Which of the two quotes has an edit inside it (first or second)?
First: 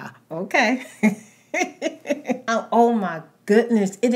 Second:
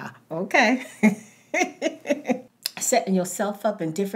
second